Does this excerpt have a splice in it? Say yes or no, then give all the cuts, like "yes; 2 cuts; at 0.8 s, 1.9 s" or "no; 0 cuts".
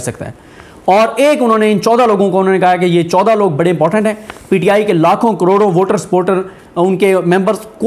no; 0 cuts